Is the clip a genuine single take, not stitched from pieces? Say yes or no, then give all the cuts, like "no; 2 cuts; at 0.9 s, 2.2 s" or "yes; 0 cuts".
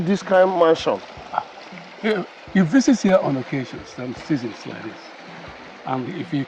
yes; 0 cuts